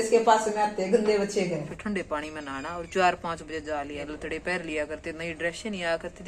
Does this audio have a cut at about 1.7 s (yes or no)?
yes